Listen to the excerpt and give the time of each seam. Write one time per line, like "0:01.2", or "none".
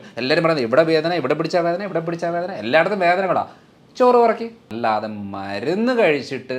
0:04.6